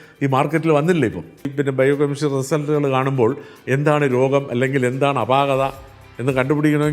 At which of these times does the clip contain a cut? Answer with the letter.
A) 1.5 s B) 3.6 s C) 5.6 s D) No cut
A